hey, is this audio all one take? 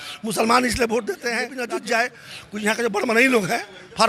no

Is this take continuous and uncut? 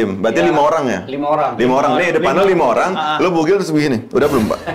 yes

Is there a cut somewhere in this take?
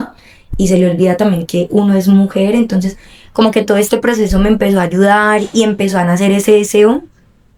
no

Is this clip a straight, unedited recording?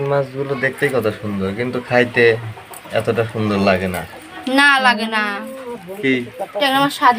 yes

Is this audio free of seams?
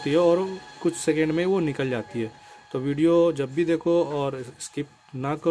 yes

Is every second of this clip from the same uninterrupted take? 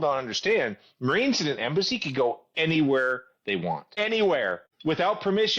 no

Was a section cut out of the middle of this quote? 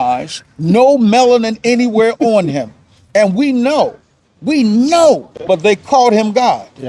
yes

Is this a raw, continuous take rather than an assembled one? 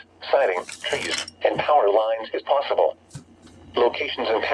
yes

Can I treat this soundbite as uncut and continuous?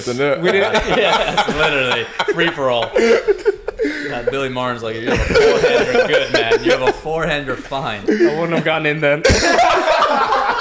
yes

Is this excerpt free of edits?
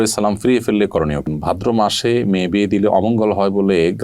no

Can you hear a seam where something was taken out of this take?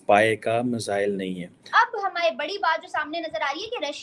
yes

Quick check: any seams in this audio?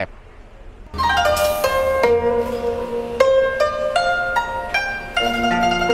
no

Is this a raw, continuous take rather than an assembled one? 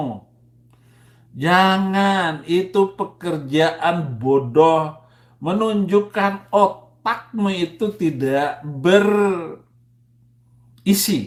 yes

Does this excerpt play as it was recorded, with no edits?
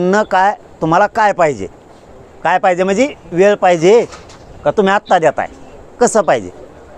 yes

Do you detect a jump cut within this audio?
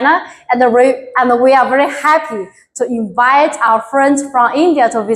no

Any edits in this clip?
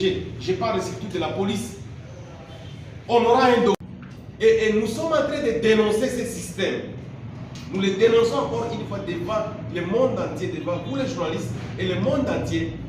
yes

